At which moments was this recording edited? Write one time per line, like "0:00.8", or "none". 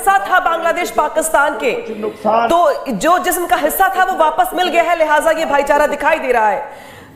none